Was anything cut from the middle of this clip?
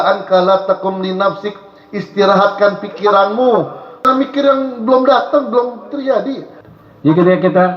yes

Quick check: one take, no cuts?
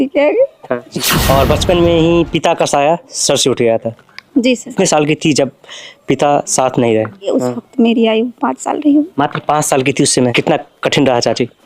no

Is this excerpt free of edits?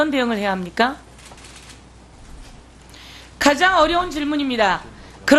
yes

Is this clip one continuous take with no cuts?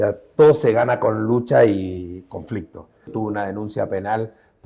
no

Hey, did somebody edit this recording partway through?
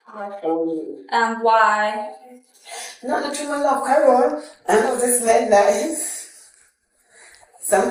no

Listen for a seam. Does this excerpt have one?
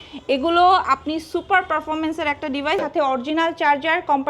yes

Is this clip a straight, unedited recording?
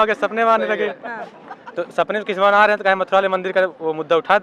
yes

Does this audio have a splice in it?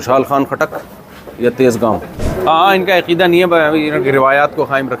yes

